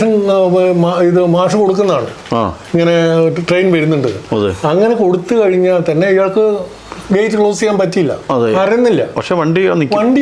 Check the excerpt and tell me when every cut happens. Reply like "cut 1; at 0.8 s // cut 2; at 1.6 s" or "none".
none